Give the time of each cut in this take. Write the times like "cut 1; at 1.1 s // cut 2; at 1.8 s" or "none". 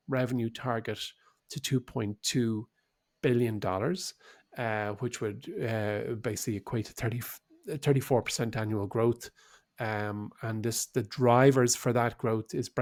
none